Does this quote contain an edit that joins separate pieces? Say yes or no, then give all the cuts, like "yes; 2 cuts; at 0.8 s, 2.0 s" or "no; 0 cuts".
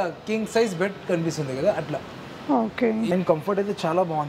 yes; 1 cut; at 3.1 s